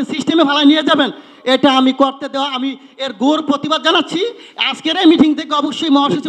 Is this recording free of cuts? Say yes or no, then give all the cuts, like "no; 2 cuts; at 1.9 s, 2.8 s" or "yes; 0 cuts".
yes; 0 cuts